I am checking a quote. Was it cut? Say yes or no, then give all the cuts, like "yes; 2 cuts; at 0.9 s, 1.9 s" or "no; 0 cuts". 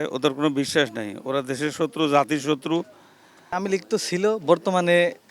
yes; 1 cut; at 3.5 s